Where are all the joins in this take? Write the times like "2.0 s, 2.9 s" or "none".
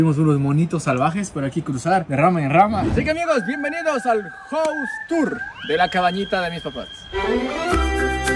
2.1 s, 2.9 s